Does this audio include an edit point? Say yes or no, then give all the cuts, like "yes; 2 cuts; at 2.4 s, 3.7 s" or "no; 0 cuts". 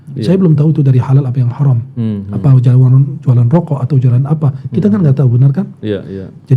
no; 0 cuts